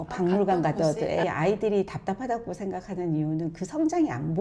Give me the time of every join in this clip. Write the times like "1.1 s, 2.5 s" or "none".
1.3 s